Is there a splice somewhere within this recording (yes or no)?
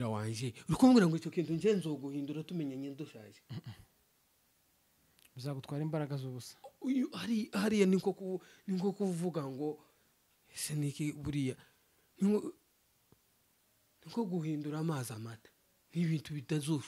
no